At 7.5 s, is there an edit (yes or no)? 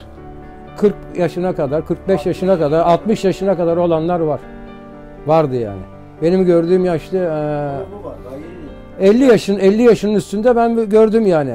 no